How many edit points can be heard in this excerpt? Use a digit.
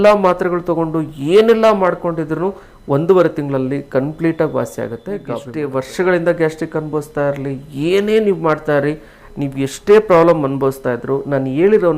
1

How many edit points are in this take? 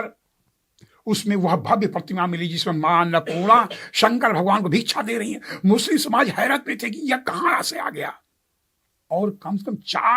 1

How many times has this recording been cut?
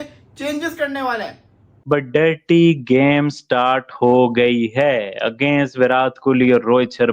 1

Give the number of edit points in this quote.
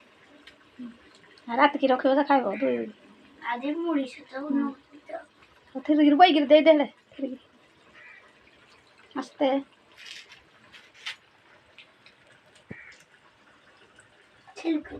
0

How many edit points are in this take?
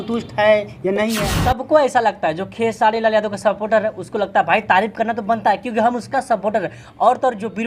1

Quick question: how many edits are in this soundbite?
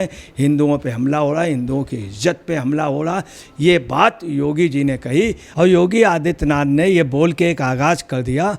1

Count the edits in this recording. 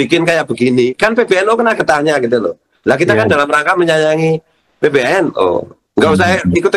0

